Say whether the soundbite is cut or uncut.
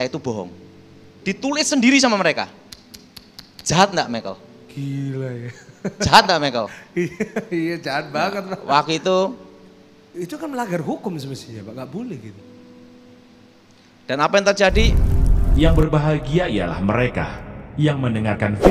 cut